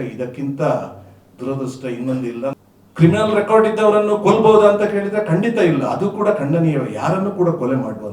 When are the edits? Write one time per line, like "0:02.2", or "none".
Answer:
0:02.5